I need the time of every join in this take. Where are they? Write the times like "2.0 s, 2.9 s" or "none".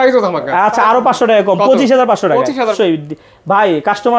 2.7 s